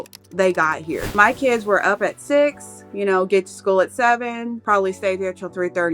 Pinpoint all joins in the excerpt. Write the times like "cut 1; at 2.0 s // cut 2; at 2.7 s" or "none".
cut 1; at 1.1 s // cut 2; at 4.6 s